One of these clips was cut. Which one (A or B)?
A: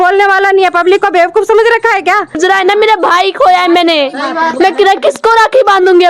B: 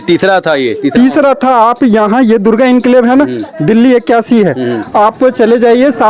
A